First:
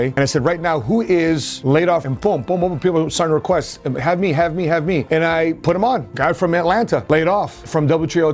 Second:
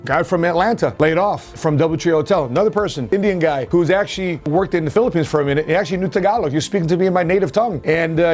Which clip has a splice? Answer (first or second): first